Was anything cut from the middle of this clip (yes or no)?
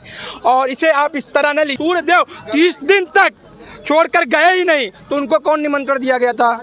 yes